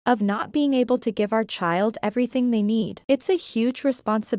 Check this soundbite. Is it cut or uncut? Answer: cut